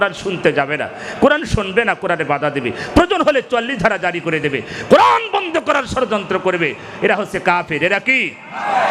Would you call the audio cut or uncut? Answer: uncut